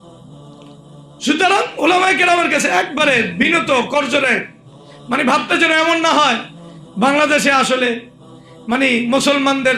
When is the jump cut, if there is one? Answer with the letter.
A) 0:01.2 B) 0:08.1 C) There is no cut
A